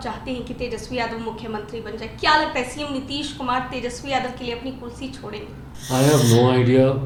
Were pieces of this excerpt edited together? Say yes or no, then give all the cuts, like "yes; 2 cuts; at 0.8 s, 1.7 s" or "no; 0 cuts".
no; 0 cuts